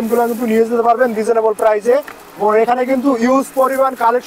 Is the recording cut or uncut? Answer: uncut